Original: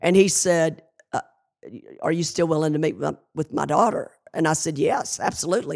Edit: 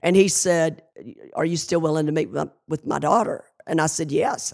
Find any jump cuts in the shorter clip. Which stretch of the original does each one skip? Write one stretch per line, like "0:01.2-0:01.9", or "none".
0:00.9-0:01.6